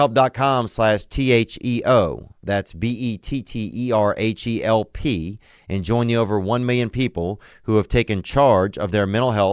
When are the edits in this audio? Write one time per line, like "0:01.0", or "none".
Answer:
none